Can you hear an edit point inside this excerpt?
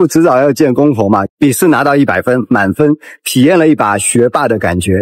yes; 1 cut; at 1.2 s

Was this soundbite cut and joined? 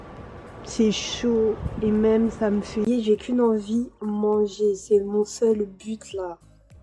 yes; 1 cut; at 2.9 s

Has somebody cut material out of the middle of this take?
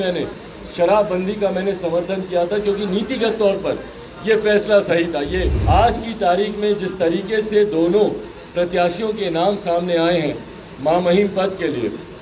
yes; 1 cut; at 5.6 s

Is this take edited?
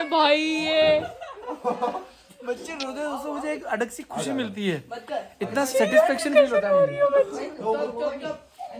no; 0 cuts

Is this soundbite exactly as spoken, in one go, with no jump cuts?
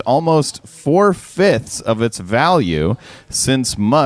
yes; 0 cuts

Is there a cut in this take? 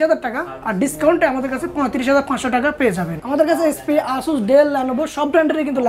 no; 0 cuts

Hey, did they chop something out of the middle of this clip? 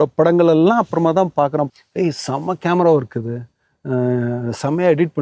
yes; 1 cut; at 1.7 s

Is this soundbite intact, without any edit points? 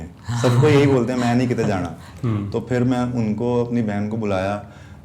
yes; 0 cuts

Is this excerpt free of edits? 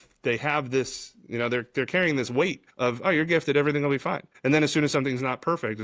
no; 2 cuts; at 2.6 s, 4.3 s

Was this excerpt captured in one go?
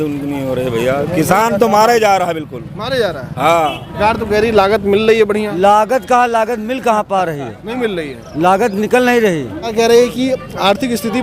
no; 2 cuts; at 3.9 s, 9.7 s

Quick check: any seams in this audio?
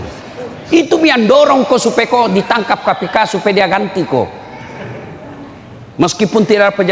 no; 0 cuts

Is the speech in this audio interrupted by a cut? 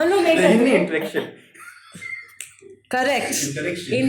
no; 0 cuts

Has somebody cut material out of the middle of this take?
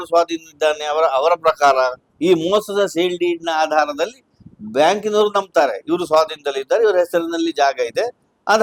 no; 0 cuts

